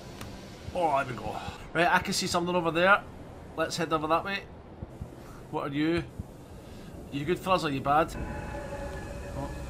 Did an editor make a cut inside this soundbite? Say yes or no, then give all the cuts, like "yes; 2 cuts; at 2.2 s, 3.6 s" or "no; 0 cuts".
yes; 2 cuts; at 1.6 s, 8.1 s